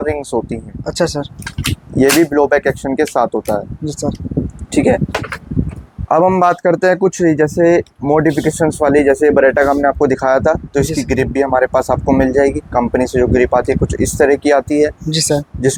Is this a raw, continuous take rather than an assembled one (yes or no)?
yes